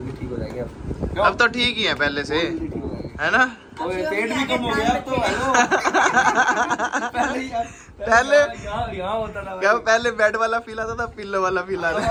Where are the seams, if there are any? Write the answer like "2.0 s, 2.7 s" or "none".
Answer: none